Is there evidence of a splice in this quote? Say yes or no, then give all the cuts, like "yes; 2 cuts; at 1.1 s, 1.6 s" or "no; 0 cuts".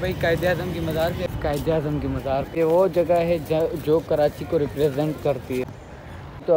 yes; 3 cuts; at 1.3 s, 2.5 s, 5.7 s